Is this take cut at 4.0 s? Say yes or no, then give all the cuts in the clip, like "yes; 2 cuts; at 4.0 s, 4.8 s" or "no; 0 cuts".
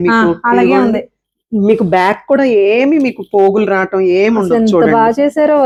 no; 0 cuts